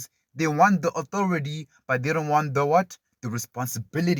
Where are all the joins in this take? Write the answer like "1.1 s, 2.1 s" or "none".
none